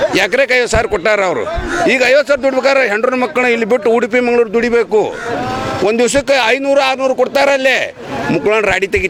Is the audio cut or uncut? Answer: uncut